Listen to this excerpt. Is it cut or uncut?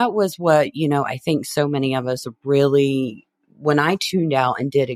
uncut